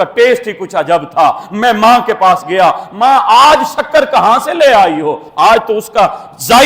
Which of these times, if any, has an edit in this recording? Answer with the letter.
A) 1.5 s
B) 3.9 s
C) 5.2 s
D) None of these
D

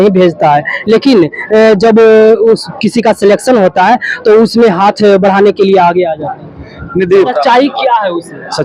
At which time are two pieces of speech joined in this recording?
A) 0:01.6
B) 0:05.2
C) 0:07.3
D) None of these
C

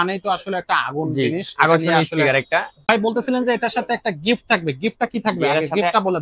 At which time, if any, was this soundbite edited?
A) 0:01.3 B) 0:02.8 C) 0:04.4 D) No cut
B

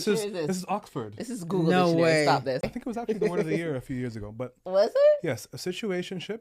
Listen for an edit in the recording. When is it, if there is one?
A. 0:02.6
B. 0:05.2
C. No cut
A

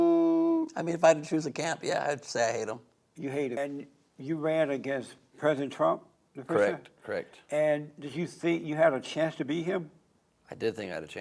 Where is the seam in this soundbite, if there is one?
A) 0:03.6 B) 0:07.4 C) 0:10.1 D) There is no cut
A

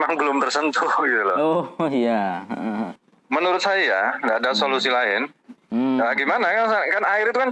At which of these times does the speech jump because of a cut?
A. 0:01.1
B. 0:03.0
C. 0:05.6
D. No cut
B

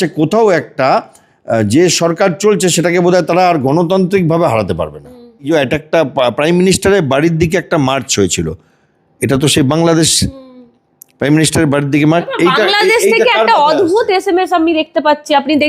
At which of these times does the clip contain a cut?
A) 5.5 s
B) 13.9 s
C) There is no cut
A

